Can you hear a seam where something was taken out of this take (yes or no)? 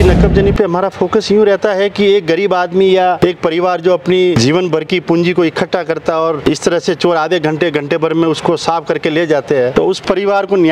yes